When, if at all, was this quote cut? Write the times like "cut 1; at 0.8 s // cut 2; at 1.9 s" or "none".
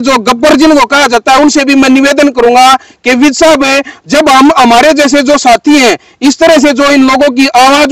none